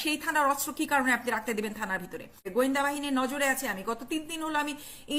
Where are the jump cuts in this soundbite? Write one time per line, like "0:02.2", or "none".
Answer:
0:02.5